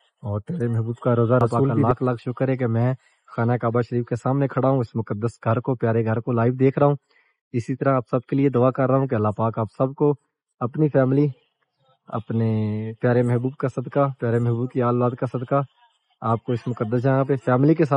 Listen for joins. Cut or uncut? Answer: cut